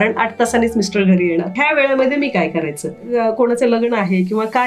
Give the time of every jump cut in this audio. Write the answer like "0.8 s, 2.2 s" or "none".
1.6 s, 3.0 s